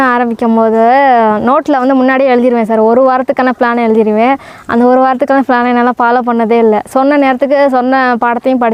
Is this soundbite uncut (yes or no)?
yes